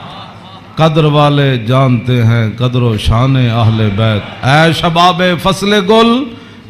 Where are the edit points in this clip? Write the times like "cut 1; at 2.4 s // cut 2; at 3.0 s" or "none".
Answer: none